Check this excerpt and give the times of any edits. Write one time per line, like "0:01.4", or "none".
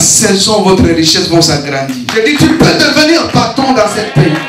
0:02.0